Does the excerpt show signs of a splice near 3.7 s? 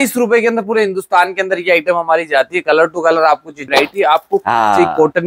yes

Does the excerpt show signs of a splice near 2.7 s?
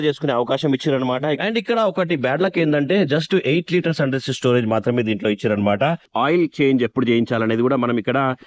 no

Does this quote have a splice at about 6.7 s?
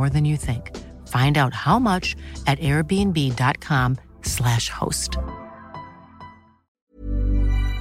yes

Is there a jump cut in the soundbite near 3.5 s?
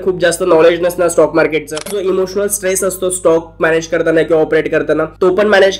no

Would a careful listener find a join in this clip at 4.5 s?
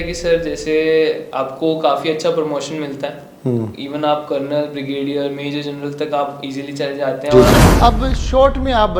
no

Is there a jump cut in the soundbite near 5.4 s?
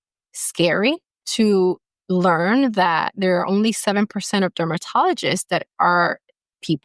no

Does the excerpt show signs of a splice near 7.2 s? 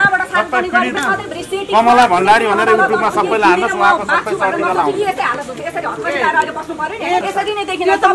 yes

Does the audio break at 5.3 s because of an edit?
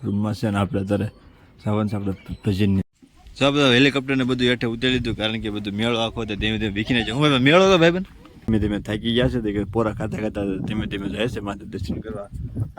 no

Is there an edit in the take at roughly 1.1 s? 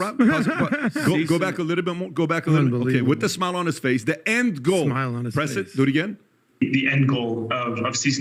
no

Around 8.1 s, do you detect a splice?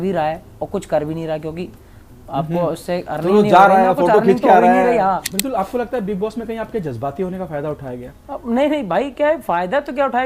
yes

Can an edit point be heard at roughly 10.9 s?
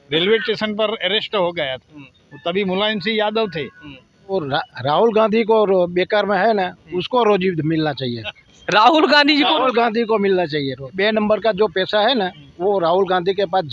yes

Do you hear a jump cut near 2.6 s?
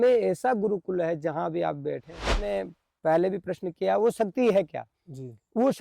yes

